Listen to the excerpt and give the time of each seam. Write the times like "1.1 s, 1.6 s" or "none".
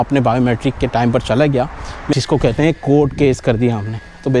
2.1 s